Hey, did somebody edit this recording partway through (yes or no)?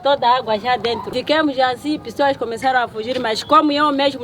yes